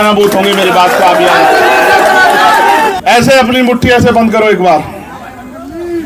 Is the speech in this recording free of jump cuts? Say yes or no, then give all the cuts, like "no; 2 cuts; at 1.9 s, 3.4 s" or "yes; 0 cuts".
no; 1 cut; at 2.9 s